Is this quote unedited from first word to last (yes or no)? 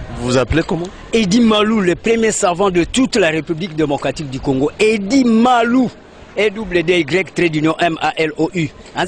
yes